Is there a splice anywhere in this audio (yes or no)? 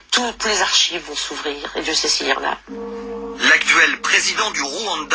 no